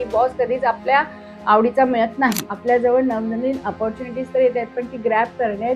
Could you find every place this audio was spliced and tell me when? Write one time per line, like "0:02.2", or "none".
0:02.5